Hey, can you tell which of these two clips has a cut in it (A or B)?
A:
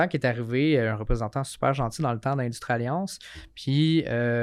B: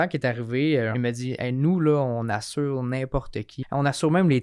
B